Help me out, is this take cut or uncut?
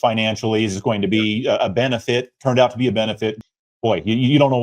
cut